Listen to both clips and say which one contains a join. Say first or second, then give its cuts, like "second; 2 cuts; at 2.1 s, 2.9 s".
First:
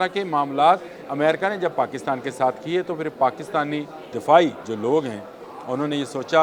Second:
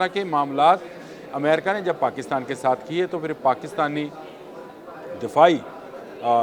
first; 3 cuts; at 1.0 s, 4.0 s, 4.7 s